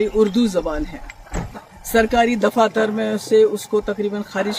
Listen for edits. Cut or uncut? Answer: uncut